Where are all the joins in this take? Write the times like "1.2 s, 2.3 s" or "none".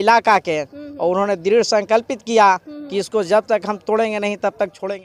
none